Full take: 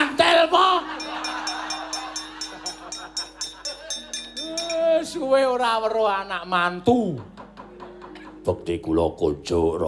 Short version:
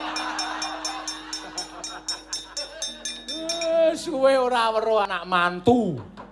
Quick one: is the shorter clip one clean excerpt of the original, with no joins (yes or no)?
no